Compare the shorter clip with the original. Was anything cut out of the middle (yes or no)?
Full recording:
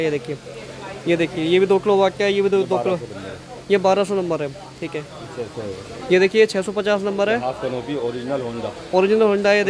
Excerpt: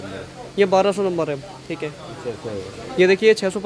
no